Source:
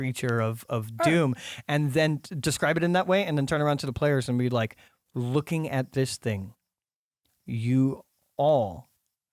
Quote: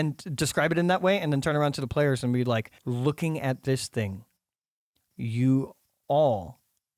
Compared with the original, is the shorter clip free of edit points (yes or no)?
no